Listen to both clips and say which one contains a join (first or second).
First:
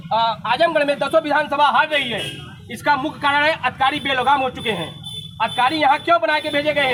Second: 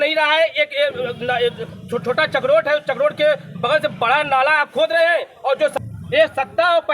second